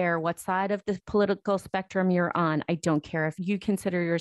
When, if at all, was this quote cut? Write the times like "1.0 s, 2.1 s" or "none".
1.0 s